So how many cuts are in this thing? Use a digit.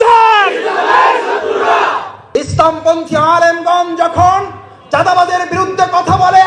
1